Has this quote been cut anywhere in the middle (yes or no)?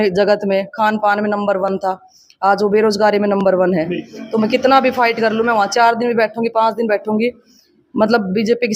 no